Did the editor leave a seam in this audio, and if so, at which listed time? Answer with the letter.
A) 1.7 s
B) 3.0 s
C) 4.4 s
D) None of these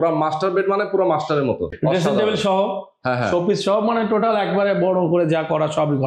A